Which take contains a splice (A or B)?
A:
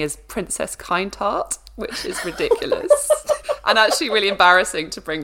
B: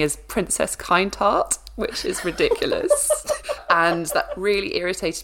B